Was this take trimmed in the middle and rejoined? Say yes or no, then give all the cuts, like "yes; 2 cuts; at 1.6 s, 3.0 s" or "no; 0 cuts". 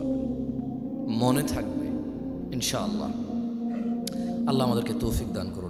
no; 0 cuts